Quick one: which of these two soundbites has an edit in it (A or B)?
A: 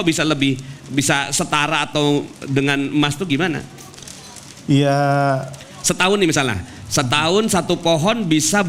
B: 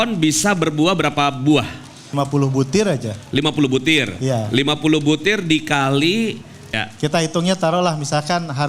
B